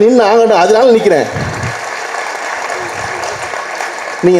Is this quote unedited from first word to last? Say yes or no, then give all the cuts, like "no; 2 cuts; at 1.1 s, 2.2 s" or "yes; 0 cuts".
yes; 0 cuts